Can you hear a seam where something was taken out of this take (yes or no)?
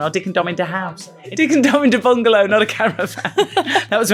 yes